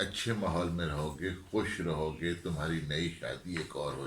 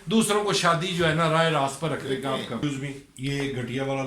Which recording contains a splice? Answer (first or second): second